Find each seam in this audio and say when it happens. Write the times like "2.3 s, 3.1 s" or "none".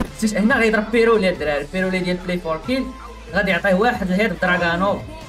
none